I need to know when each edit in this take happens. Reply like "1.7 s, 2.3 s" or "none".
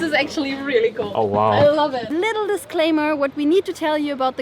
1.1 s, 2.0 s